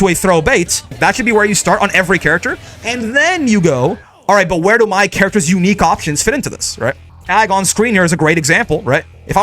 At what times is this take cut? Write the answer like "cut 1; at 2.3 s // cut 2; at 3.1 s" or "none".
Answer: cut 1; at 1.0 s // cut 2; at 7.1 s